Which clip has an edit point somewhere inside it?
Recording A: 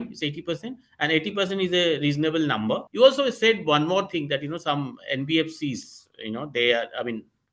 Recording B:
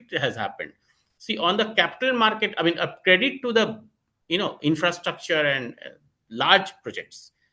A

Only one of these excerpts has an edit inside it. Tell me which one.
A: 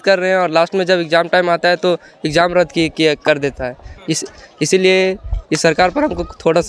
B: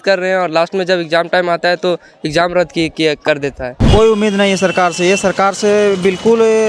B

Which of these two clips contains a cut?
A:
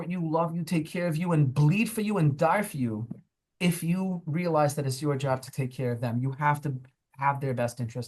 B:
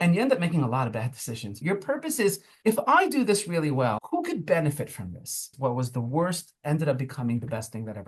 B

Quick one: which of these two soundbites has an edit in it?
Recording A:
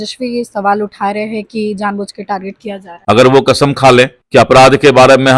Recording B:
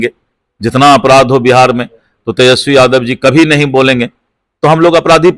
A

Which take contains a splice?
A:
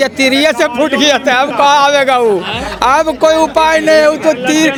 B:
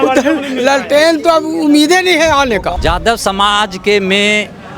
B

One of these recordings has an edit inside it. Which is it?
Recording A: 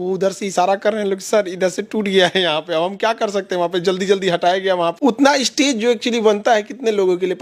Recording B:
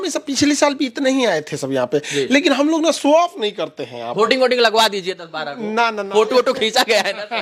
A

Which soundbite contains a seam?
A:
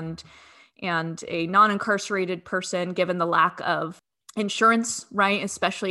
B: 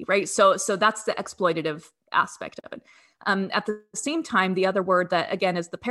A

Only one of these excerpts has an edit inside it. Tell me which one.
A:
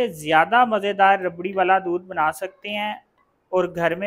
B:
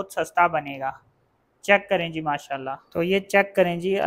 B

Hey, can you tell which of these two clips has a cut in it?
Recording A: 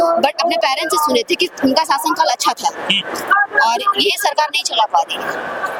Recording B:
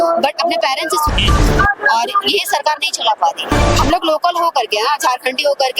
B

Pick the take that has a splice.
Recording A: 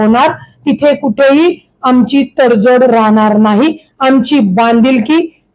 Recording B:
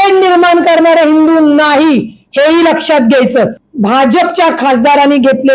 B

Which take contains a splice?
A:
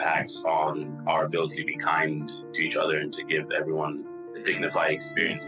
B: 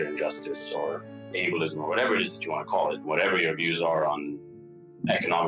B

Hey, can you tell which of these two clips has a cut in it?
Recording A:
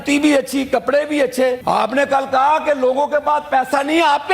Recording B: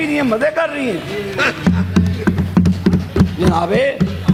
A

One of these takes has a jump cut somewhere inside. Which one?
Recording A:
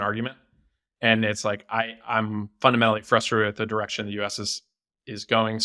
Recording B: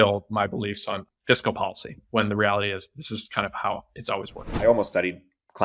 B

